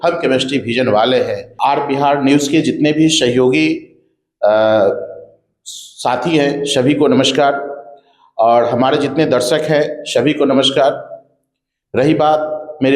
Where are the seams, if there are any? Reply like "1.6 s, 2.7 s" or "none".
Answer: none